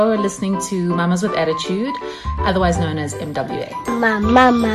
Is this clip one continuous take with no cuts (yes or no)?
yes